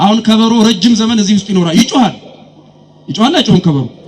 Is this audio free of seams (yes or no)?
yes